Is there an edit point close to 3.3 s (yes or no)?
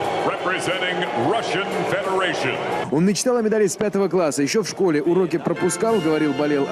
no